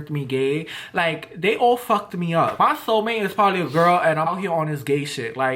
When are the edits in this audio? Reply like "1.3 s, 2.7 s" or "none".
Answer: 2.6 s, 4.3 s